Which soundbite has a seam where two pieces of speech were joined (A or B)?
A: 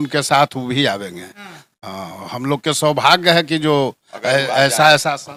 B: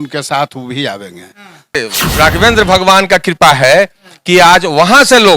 B